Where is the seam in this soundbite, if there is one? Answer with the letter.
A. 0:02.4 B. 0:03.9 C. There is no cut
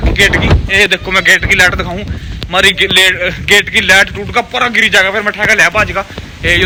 C